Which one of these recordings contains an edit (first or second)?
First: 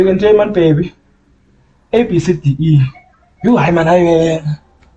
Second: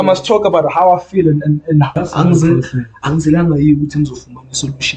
second